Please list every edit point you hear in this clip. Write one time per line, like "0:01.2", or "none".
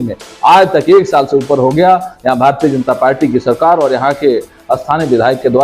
none